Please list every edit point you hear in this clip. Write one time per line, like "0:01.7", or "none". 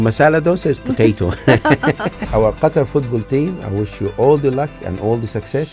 0:02.2